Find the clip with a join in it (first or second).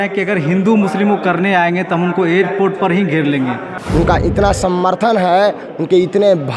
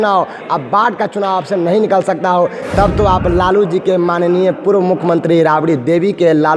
first